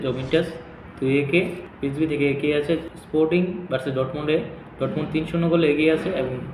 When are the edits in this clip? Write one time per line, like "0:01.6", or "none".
0:01.6
0:02.9